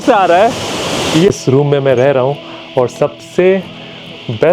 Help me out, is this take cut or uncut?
cut